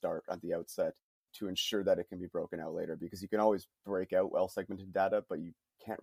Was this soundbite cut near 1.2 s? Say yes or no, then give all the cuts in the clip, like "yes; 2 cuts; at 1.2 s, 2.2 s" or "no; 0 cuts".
yes; 1 cut; at 1.2 s